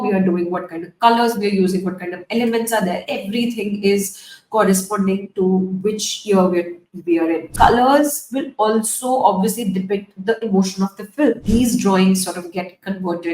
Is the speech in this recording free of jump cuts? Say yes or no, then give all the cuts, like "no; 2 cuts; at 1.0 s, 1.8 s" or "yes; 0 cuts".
no; 2 cuts; at 7.5 s, 11.4 s